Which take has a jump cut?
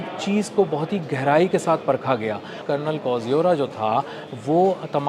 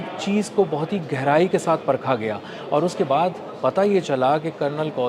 first; 1 cut; at 2.6 s

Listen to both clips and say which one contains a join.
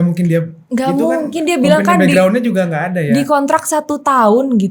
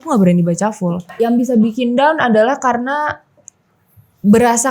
second; 1 cut; at 1.1 s

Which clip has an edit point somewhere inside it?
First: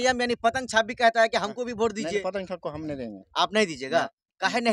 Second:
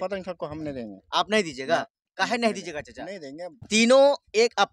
second; 1 cut; at 3.6 s

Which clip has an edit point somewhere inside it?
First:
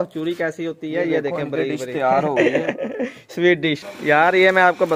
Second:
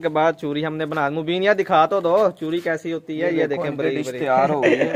first; 1 cut; at 3.9 s

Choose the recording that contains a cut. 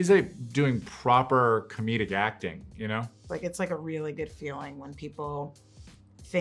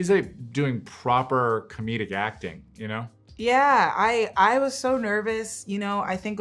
first; 1 cut; at 3.2 s

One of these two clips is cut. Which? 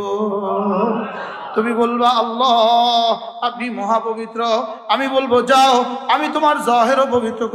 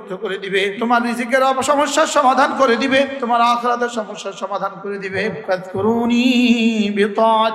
second; 3 cuts; at 0.8 s, 3.2 s, 5.4 s

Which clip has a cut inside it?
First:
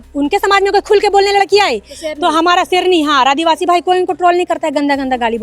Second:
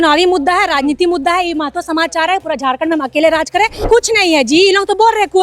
second; 1 cut; at 3.8 s

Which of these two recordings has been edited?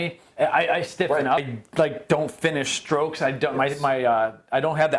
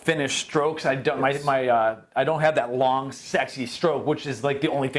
first; 1 cut; at 1.5 s

